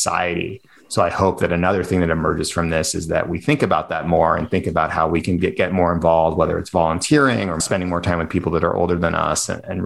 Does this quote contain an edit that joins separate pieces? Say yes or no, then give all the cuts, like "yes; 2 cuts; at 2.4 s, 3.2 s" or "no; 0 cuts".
yes; 1 cut; at 7.5 s